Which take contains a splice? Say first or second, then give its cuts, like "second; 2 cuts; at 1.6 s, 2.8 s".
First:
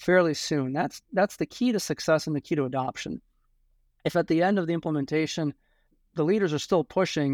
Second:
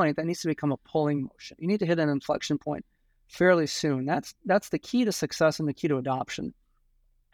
first; 1 cut; at 5.9 s